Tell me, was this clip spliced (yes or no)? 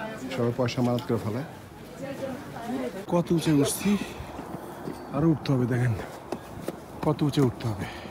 yes